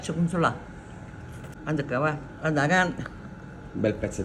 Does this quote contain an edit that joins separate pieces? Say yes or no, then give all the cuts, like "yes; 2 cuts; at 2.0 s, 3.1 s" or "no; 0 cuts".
no; 0 cuts